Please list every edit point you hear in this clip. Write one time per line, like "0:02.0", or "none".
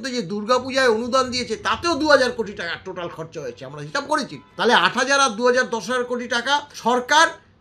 0:04.4
0:06.7